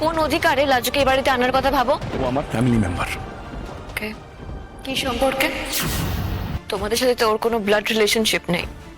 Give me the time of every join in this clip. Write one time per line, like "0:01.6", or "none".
0:02.1
0:06.5